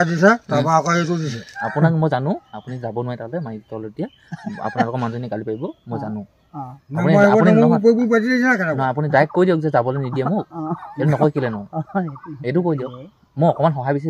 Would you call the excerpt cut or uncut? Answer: cut